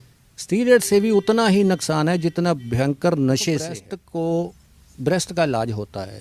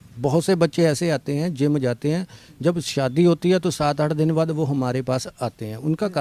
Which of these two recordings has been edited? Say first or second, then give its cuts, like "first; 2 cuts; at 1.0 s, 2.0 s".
first; 1 cut; at 3.9 s